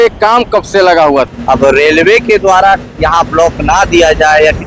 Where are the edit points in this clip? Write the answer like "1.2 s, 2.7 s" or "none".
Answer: 1.3 s

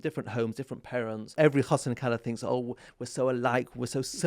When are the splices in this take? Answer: 1.3 s

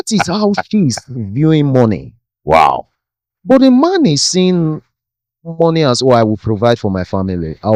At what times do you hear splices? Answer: none

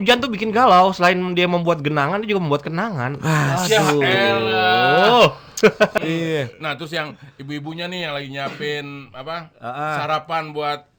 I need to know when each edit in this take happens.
5.9 s

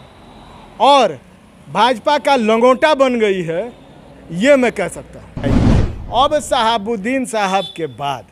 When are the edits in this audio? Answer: 5.4 s

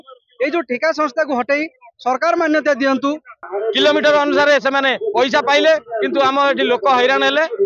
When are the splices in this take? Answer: 3.4 s

